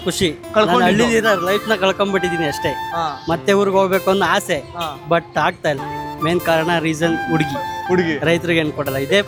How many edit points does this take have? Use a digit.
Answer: 0